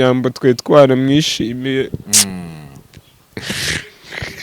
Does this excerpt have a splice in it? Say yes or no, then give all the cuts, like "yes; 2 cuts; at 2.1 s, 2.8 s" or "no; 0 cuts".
no; 0 cuts